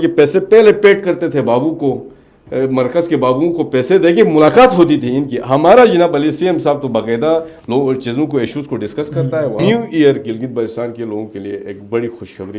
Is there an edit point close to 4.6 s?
no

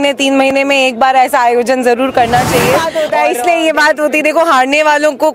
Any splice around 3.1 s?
yes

